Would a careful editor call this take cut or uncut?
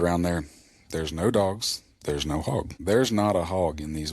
cut